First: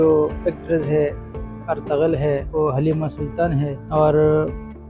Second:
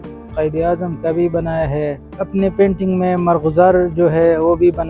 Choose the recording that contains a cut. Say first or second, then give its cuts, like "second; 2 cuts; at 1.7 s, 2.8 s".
second; 1 cut; at 2.1 s